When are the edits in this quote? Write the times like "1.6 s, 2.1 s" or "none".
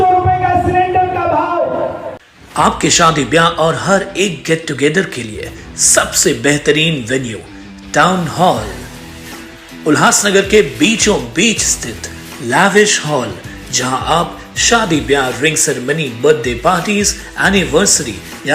2.2 s